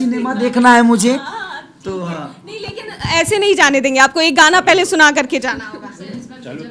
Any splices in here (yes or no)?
no